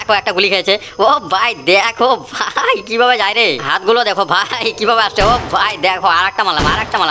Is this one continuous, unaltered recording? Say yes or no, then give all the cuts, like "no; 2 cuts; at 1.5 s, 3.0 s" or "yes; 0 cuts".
yes; 0 cuts